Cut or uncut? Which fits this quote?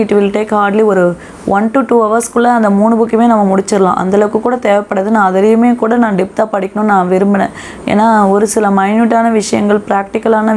uncut